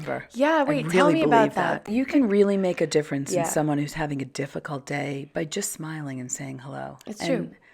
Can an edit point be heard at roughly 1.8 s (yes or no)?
yes